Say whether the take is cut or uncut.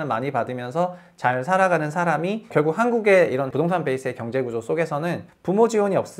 cut